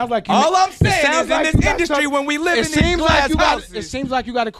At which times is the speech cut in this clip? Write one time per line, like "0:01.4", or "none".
none

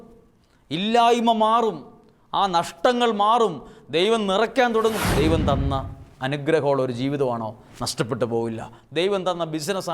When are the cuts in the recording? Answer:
0:05.0

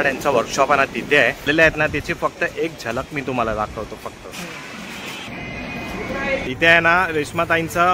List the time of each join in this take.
0:01.5
0:05.3
0:06.5

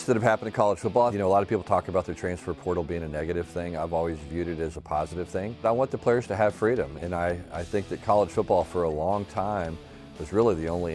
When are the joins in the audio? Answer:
0:01.1
0:05.6

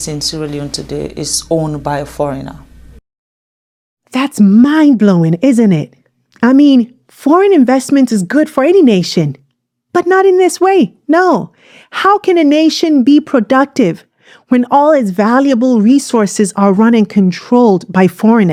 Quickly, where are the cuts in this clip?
none

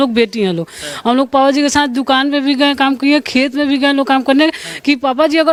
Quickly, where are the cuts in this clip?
none

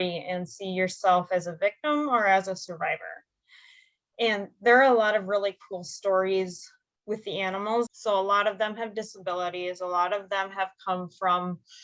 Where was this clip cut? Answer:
0:07.9

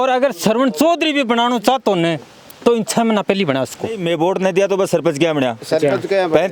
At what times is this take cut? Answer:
0:04.0

